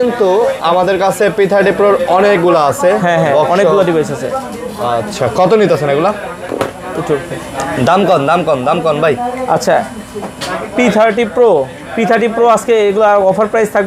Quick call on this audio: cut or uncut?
uncut